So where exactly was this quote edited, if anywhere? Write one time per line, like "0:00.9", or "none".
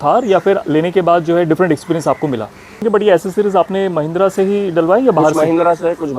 0:02.8